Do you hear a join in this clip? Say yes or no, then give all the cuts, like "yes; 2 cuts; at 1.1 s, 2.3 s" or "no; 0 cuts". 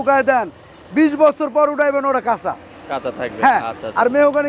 no; 0 cuts